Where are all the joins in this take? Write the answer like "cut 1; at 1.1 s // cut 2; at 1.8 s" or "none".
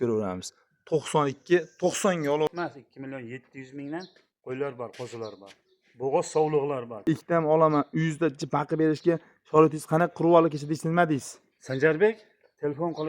cut 1; at 2.5 s // cut 2; at 7.0 s